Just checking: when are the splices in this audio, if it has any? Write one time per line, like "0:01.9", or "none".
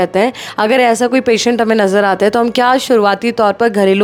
none